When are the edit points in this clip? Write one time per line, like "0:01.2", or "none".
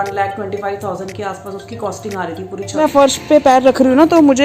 0:02.8